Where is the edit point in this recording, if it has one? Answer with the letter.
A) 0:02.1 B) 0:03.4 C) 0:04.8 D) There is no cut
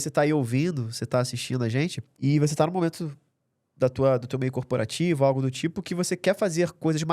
A